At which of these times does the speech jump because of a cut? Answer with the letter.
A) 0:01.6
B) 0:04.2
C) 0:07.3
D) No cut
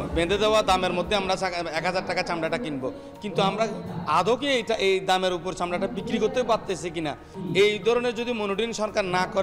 C